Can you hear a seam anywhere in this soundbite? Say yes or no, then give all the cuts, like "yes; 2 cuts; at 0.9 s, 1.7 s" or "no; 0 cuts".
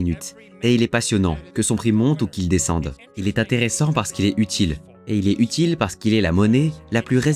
no; 0 cuts